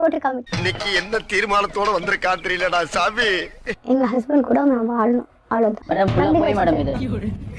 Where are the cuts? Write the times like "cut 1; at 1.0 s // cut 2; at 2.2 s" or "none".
cut 1; at 3.6 s // cut 2; at 5.8 s